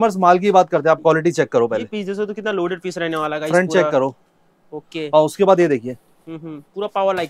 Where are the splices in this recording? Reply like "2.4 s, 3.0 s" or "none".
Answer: none

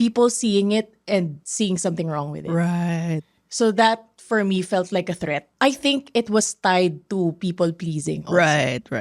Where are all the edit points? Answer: 5.4 s

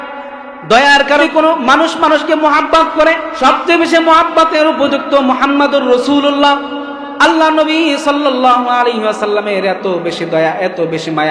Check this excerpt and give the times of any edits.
1.2 s, 3.3 s

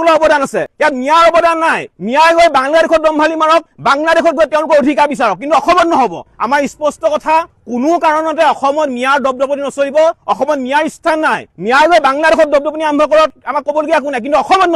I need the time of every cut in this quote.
6.2 s, 7.5 s

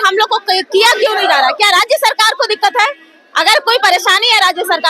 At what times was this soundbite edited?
none

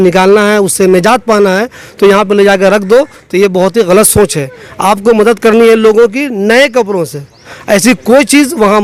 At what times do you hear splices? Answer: none

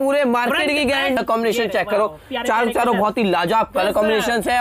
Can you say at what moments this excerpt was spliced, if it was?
1.2 s

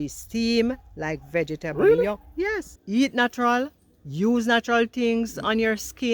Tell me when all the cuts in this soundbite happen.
2.7 s

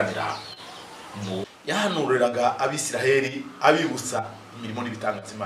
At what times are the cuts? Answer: 1.5 s

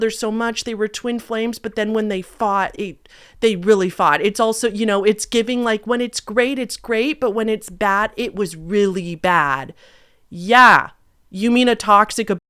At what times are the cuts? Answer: none

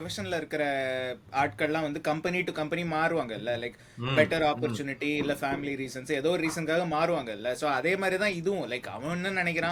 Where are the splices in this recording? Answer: none

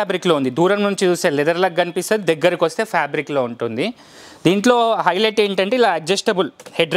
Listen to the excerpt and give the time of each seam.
none

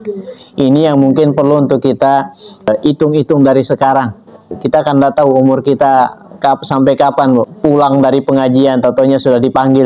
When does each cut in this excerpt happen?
2.7 s, 4.5 s, 7.5 s

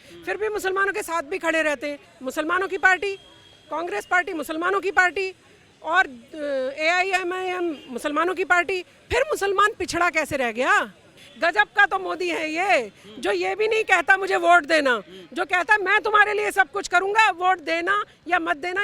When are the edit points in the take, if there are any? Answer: 2.1 s, 11.2 s

